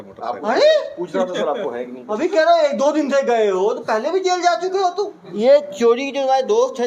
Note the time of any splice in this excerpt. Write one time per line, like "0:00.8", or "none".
0:05.2

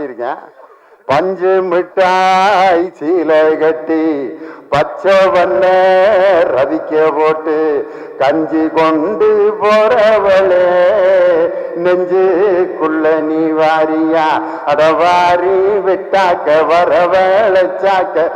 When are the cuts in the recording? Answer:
none

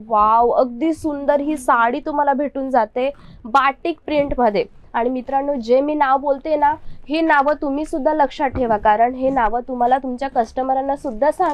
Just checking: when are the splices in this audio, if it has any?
none

